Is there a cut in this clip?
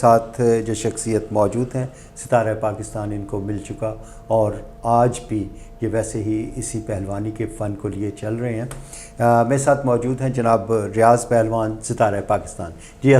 no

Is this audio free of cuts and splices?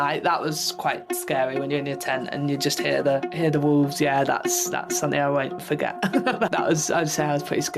no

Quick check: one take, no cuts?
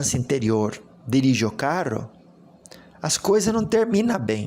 yes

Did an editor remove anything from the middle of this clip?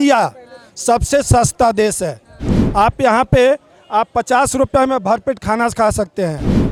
no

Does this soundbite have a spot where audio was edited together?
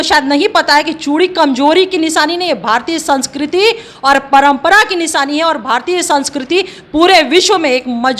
no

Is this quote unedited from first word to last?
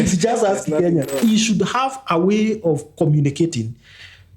no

